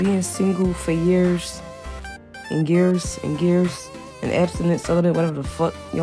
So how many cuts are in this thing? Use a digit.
0